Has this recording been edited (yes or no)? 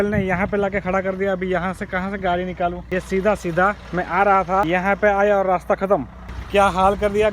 yes